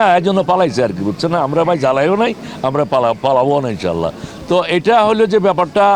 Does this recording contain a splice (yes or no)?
no